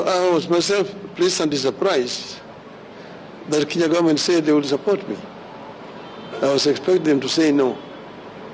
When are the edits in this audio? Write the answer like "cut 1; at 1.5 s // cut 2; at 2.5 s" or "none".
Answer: none